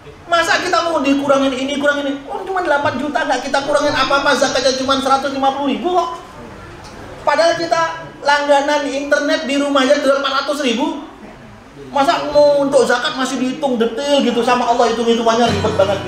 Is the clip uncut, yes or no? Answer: yes